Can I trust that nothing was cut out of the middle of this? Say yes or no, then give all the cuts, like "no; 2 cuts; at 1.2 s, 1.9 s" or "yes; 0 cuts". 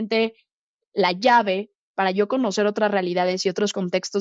yes; 0 cuts